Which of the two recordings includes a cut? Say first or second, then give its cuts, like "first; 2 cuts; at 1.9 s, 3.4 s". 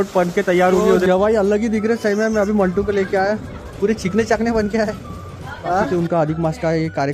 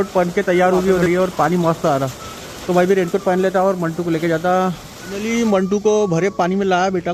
first; 2 cuts; at 1.0 s, 6.1 s